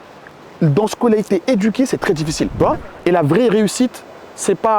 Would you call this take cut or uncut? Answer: cut